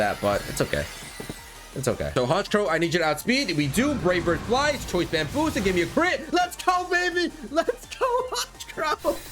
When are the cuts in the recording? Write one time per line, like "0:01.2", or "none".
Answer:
0:02.1